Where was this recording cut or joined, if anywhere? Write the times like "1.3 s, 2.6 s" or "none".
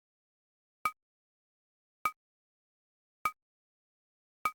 none